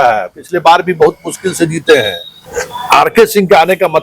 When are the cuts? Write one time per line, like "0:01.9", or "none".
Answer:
0:02.3